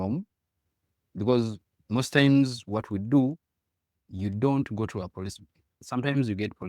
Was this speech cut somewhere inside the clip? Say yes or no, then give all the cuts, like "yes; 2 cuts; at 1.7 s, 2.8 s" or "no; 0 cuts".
yes; 1 cut; at 5.8 s